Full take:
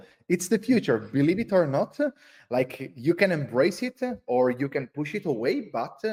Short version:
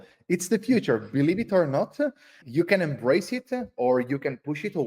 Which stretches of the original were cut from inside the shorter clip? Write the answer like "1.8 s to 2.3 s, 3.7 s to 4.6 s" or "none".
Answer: 2.3 s to 2.8 s